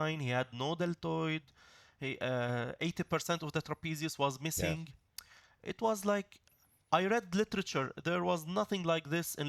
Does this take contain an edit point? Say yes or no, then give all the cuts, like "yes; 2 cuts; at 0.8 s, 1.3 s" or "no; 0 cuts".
no; 0 cuts